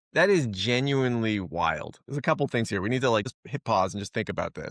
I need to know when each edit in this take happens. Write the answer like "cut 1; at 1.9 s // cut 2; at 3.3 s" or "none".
cut 1; at 3.4 s